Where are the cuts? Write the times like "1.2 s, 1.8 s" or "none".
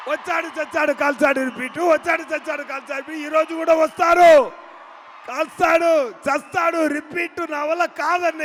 none

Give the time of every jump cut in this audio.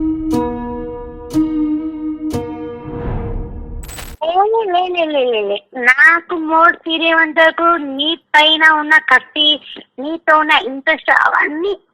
4.0 s

